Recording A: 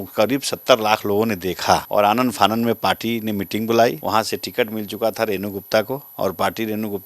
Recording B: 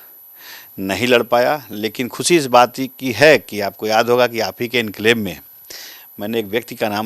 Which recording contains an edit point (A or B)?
A